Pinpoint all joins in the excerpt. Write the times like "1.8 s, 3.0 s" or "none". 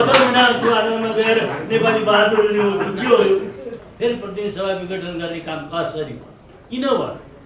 3.8 s